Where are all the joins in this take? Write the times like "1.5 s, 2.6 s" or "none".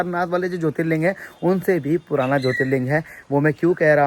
none